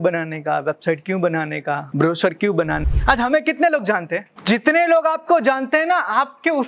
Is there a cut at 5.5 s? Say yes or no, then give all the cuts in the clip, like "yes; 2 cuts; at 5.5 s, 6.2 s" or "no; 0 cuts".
no; 3 cuts; at 1.9 s, 2.8 s, 4.3 s